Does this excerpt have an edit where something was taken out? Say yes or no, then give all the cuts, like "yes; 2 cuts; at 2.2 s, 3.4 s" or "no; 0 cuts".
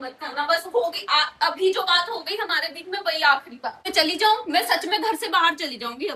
yes; 1 cut; at 3.8 s